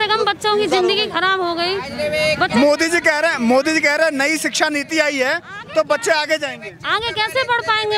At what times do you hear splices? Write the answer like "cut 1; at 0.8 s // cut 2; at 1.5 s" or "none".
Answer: none